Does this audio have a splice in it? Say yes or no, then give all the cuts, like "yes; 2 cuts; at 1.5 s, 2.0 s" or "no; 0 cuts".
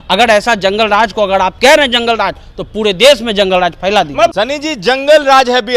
yes; 1 cut; at 4.3 s